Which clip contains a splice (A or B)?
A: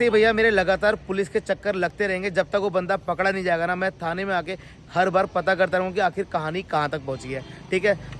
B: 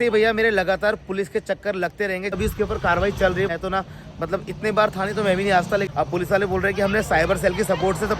B